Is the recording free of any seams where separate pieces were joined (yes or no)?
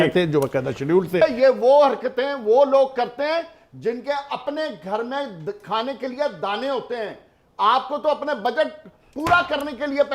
no